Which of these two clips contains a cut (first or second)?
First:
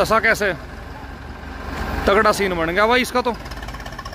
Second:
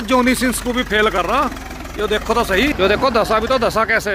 second